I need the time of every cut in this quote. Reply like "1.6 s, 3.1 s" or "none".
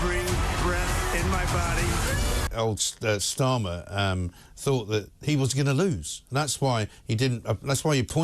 2.5 s